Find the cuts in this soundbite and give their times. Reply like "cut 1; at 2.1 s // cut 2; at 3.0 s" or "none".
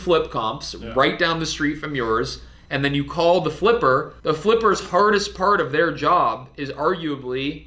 cut 1; at 4.1 s